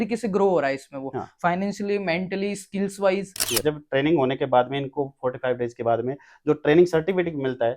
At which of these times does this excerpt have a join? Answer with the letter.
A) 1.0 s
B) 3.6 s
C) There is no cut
B